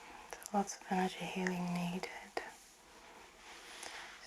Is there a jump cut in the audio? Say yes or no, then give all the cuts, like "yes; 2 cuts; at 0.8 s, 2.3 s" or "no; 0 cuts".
yes; 1 cut; at 3.0 s